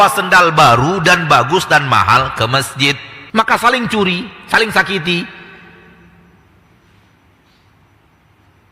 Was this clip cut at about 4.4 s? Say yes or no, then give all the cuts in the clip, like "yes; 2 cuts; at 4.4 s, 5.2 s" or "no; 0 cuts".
no; 1 cut; at 3.1 s